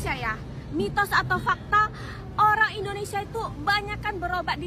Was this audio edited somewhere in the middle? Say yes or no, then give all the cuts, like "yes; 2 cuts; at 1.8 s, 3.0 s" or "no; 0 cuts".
no; 0 cuts